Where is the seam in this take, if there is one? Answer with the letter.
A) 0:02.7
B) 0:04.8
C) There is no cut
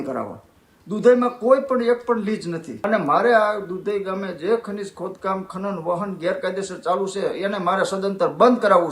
A